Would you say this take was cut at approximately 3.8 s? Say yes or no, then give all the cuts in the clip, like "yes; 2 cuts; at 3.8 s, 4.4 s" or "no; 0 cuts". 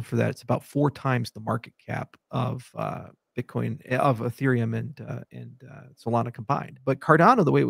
no; 1 cut; at 6.7 s